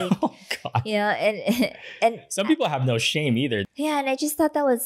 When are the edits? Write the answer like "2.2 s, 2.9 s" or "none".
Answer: 3.6 s